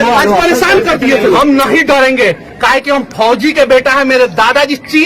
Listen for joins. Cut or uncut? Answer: cut